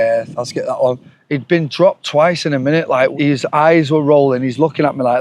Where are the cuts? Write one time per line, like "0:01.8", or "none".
0:01.1
0:03.1

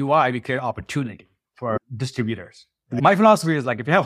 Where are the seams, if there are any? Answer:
0:03.0

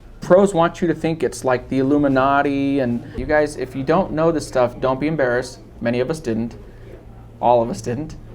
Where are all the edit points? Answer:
0:03.2

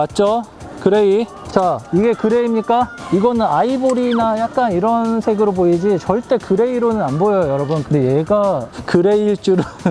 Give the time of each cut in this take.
0:07.8

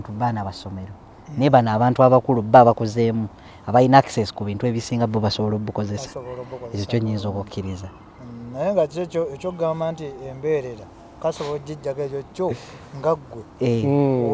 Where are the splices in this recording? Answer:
none

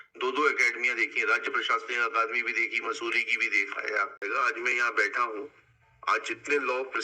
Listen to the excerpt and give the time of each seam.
0:04.2

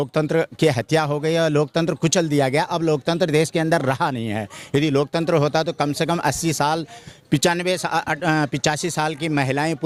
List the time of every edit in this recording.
none

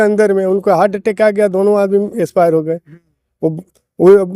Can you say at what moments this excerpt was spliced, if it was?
none

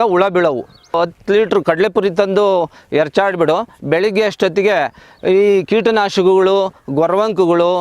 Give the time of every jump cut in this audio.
0:00.9

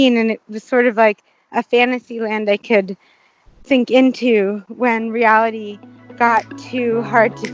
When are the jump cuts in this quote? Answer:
none

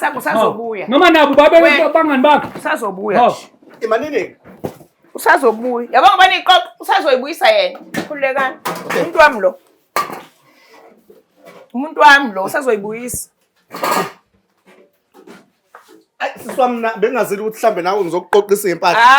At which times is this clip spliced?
none

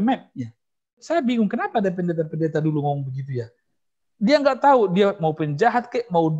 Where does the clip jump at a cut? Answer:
0:01.0

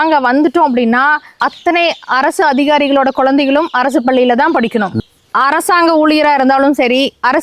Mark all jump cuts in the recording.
0:01.3
0:05.0

